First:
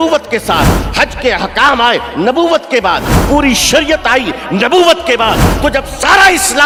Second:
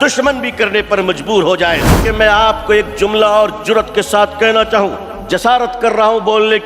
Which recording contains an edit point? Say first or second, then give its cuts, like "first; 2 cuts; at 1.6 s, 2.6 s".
second; 1 cut; at 2.0 s